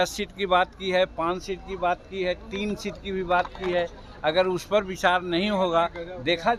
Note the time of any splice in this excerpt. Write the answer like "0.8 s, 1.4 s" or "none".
none